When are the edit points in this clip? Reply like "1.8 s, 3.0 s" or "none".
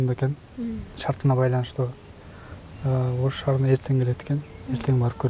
none